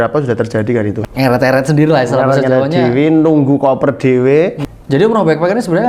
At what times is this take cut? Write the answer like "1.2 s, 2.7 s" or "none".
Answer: 1.0 s, 4.6 s